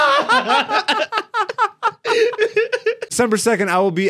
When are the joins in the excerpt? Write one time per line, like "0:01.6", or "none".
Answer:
0:03.1